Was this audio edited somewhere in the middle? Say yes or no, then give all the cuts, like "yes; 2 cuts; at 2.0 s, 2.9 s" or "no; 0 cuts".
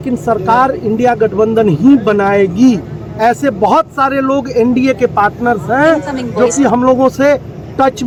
no; 0 cuts